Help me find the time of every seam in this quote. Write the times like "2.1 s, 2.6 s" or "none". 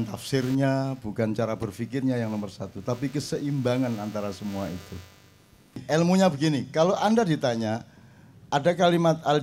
5.8 s